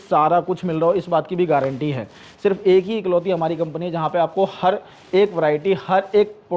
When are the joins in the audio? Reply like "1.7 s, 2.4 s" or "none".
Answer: none